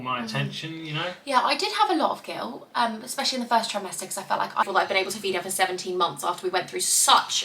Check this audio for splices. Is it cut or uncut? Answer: cut